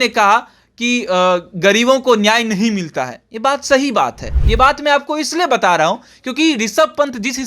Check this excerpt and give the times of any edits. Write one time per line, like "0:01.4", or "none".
0:04.3